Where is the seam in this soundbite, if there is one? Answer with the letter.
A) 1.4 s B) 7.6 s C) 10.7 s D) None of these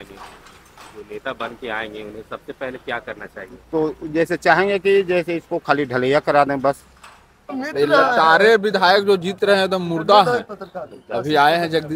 B